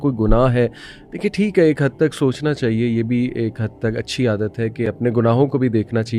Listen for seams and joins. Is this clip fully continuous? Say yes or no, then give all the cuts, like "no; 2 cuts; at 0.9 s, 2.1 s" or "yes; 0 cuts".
yes; 0 cuts